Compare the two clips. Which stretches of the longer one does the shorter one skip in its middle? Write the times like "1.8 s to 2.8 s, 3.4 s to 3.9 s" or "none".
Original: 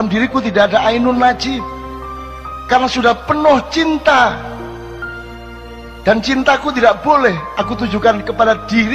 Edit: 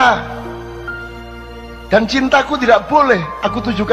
none